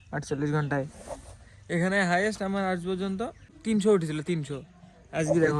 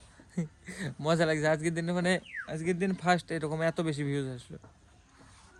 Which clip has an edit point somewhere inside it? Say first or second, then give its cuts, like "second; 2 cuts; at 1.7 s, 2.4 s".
first; 1 cut; at 3.5 s